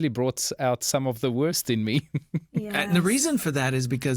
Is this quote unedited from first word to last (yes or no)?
yes